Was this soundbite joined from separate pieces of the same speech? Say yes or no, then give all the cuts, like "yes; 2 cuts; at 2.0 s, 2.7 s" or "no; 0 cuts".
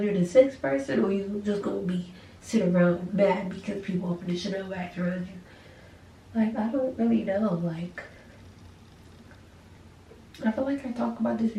no; 0 cuts